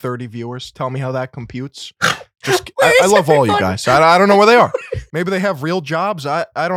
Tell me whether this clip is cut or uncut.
uncut